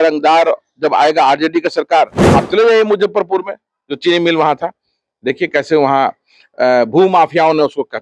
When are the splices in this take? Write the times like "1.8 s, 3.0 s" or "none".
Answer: 2.2 s